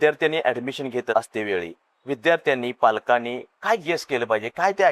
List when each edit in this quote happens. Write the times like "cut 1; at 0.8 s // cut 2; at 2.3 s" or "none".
cut 1; at 1.1 s